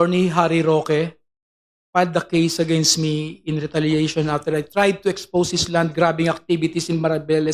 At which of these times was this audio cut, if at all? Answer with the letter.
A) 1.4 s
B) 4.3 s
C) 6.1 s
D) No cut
D